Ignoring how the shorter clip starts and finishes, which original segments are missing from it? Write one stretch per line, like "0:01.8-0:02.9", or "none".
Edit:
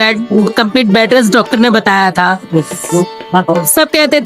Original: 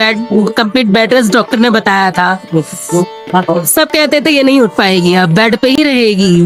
none